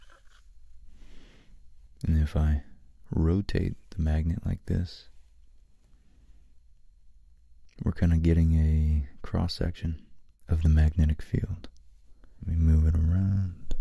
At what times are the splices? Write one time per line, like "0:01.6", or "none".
0:07.7
0:12.5